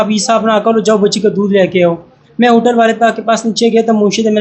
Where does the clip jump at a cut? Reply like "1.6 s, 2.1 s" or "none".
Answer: none